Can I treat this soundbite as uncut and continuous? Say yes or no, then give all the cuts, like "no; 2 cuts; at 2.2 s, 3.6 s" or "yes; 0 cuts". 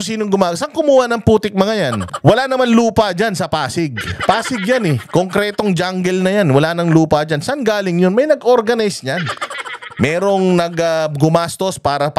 no; 1 cut; at 2.1 s